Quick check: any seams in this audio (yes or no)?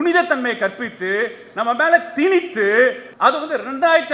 yes